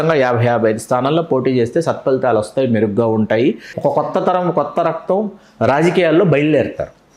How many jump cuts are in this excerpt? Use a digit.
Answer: 1